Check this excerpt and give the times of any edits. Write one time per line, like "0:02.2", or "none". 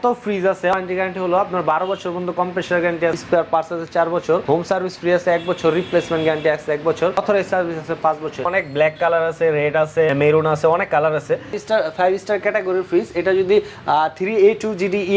0:00.7
0:03.2
0:04.4
0:07.2
0:08.5
0:10.1
0:11.6